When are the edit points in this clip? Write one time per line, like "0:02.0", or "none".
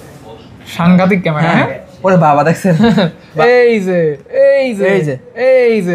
0:03.3